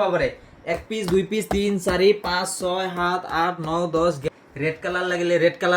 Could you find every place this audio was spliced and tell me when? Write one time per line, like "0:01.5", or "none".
0:04.2